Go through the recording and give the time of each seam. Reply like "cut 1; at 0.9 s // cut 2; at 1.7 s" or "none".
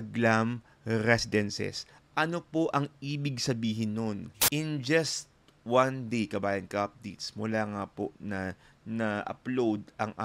cut 1; at 4.3 s